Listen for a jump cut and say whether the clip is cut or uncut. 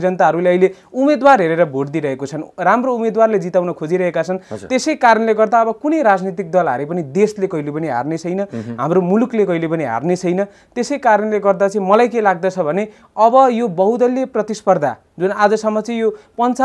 uncut